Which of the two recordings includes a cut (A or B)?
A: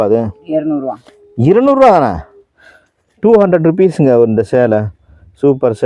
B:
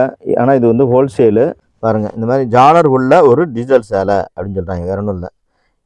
B